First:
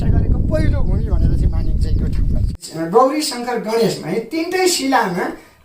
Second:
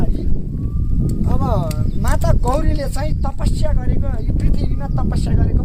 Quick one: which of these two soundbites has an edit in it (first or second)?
first